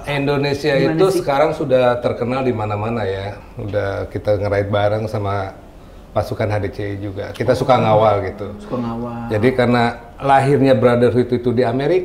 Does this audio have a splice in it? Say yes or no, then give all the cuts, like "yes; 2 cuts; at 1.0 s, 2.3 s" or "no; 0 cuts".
yes; 1 cut; at 3.4 s